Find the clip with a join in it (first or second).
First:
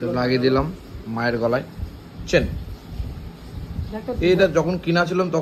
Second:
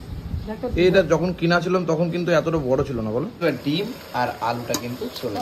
second